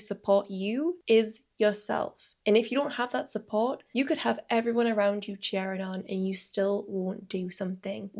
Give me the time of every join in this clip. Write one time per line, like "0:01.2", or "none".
none